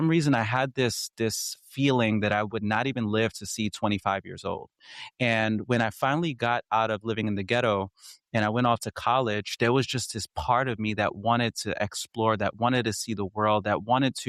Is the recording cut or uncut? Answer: uncut